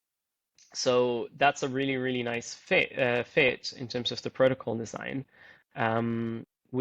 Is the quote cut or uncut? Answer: uncut